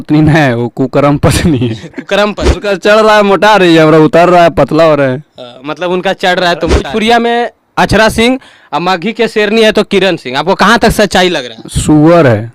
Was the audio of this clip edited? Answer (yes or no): yes